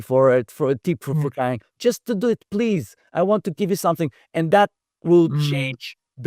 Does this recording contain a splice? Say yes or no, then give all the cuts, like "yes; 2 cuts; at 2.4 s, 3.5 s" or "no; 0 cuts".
no; 0 cuts